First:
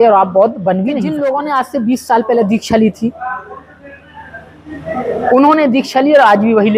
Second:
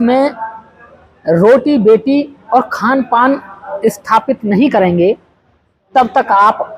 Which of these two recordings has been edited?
first; 1 cut; at 1.1 s

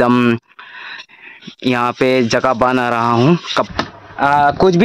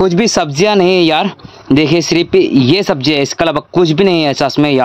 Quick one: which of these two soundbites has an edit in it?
first; 1 cut; at 3.7 s

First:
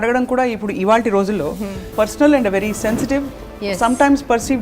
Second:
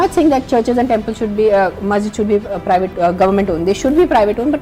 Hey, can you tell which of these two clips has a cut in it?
first; 1 cut; at 1.9 s

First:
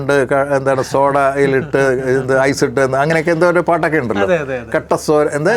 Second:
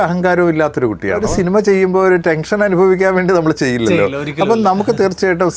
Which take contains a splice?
second; 1 cut; at 1.3 s

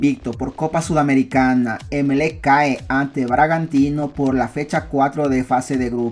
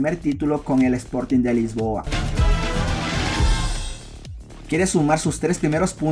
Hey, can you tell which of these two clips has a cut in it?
second; 1 cut; at 2.0 s

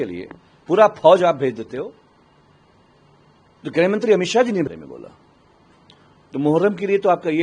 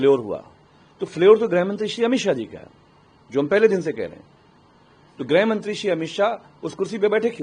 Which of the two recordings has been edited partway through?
first; 1 cut; at 4.7 s

